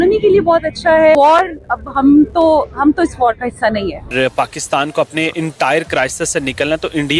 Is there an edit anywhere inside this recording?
yes; 2 cuts; at 1.2 s, 4.1 s

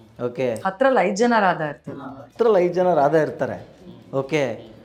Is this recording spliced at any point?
no; 0 cuts

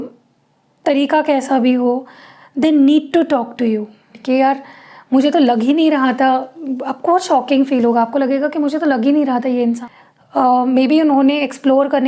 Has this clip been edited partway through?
yes; 2 cuts; at 4.2 s, 9.8 s

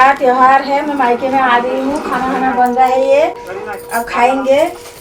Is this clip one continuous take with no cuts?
yes; 0 cuts

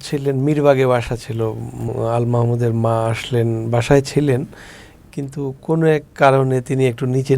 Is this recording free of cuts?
no; 1 cut; at 1.9 s

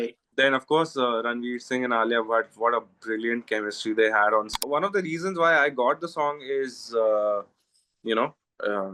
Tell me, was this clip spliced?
yes; 1 cut; at 4.6 s

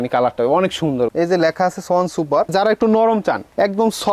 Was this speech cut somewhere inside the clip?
yes; 2 cuts; at 1.1 s, 2.5 s

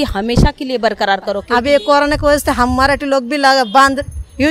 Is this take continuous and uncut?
no; 1 cut; at 1.4 s

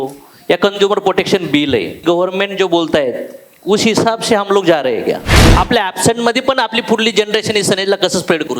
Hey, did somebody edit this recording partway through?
yes; 2 cuts; at 2.0 s, 5.4 s

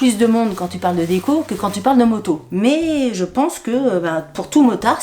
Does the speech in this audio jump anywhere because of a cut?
no; 0 cuts

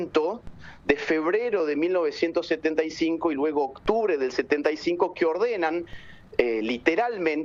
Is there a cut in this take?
no; 0 cuts

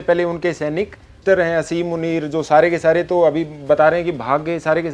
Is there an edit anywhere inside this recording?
yes; 1 cut; at 1.1 s

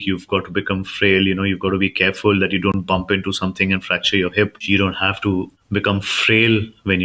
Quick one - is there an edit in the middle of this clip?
yes; 2 cuts; at 4.6 s, 5.6 s

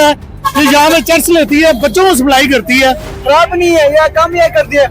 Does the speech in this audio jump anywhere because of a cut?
yes; 1 cut; at 3.1 s

